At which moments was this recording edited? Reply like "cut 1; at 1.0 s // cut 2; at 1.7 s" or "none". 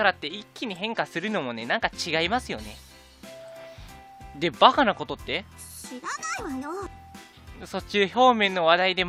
cut 1; at 8.0 s